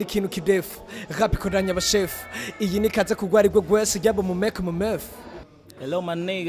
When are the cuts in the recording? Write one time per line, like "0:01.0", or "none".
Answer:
0:05.2